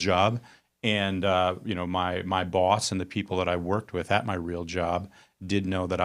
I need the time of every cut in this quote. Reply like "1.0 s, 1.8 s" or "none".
none